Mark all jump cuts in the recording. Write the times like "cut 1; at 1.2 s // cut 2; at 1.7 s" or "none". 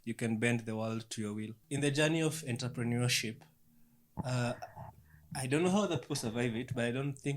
cut 1; at 1.6 s